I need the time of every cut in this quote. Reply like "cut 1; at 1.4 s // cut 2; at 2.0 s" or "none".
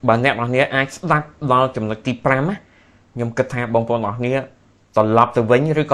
none